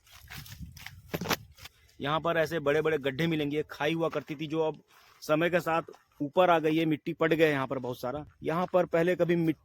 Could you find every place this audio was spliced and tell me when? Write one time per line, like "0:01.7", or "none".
0:01.5
0:08.3